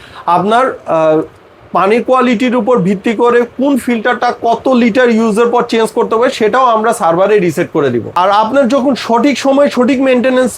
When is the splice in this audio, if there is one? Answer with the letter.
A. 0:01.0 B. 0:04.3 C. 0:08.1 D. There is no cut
C